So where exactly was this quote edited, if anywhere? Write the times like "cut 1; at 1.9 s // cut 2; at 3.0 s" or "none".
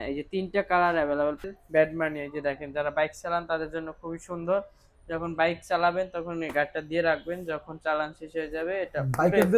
cut 1; at 1.4 s